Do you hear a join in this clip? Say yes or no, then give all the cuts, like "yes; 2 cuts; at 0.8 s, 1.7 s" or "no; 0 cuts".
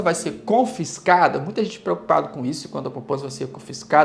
no; 0 cuts